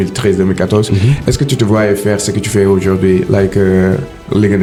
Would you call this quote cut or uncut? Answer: uncut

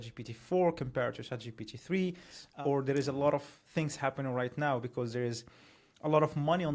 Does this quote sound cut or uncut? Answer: cut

